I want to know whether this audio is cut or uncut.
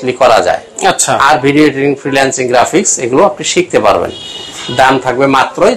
uncut